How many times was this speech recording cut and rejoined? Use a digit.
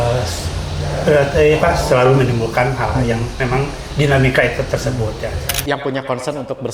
1